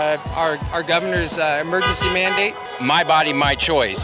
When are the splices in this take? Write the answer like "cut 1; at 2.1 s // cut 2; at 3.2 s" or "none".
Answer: cut 1; at 2.6 s